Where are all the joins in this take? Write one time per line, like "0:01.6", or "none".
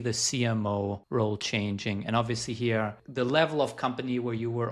0:01.0
0:03.0

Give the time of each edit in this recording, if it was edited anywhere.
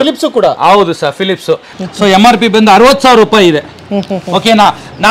0:01.7

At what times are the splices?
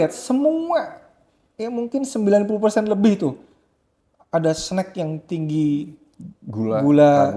none

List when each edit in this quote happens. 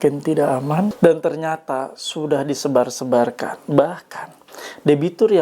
0:00.9

